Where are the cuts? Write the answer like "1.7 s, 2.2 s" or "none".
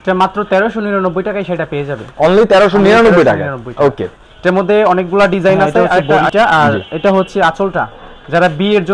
5.9 s